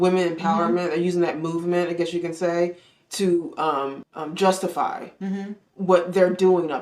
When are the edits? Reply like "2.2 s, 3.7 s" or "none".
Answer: 4.1 s